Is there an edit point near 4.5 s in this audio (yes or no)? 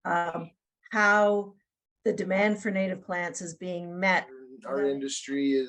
yes